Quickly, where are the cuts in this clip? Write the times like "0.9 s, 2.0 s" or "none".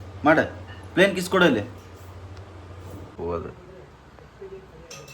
3.1 s